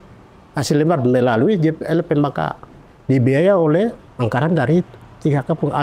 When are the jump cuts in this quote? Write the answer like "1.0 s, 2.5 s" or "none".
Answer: 4.0 s